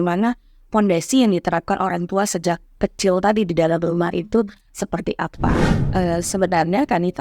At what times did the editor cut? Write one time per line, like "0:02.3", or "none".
0:05.6